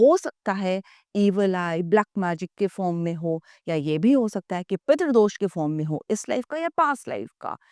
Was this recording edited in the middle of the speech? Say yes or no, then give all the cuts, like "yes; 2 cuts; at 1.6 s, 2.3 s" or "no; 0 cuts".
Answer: no; 0 cuts